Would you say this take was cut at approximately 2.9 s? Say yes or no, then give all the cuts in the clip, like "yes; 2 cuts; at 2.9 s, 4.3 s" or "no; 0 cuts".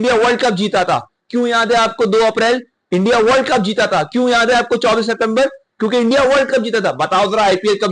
no; 0 cuts